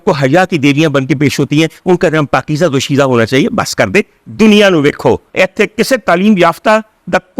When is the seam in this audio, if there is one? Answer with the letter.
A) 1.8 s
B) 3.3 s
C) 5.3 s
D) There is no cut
C